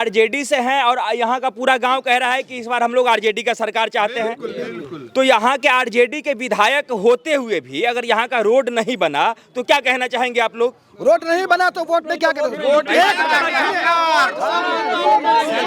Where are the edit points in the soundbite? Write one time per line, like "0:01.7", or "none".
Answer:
none